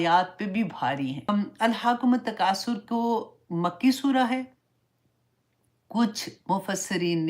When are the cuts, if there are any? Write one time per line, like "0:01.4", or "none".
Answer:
0:01.3

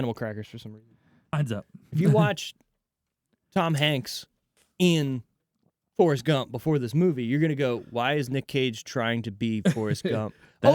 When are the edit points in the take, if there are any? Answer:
0:01.3

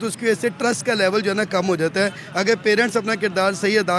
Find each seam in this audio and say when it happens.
none

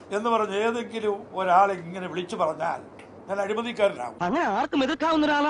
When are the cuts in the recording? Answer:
none

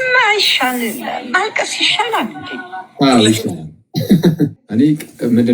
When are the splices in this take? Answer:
0:04.6

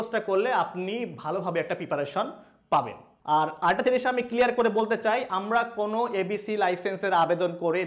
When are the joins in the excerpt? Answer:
0:03.0

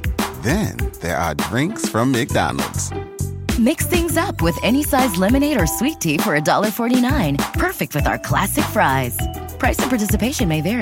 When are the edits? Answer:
none

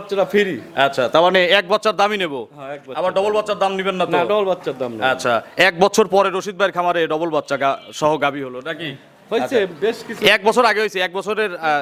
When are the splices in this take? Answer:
none

